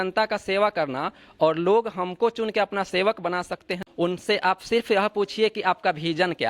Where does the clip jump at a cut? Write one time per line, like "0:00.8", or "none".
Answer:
0:03.6